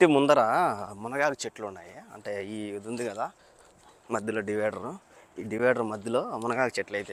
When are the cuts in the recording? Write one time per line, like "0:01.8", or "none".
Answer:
none